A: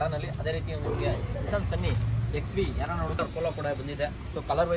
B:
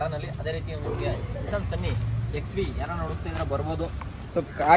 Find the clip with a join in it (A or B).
A